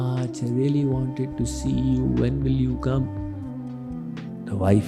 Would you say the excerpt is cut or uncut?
uncut